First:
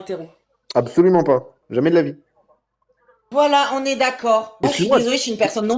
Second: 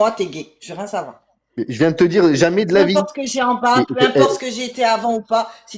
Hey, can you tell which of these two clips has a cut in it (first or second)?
first